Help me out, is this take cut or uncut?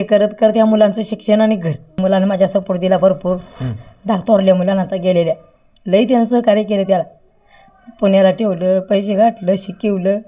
cut